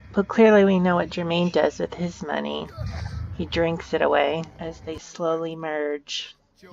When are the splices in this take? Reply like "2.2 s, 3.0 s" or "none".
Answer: 4.5 s